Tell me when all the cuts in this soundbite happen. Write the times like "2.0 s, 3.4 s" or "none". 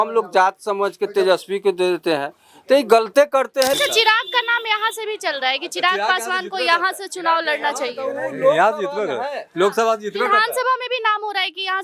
3.8 s